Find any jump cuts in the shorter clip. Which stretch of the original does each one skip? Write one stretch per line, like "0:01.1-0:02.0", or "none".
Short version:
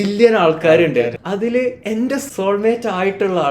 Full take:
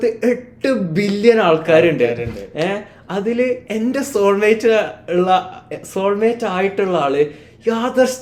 0:02.2-0:03.0
0:04.1-0:05.8